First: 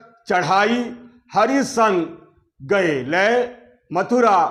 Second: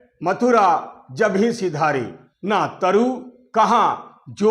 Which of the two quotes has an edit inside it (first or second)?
second